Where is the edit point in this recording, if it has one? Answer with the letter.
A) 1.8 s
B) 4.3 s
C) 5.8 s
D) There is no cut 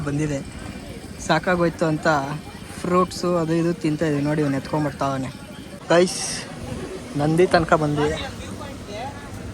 C